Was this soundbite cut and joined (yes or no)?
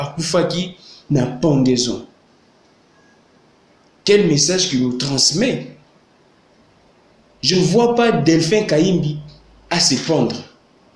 no